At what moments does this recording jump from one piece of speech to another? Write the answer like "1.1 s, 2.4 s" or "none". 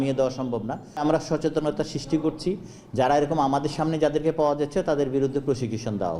1.0 s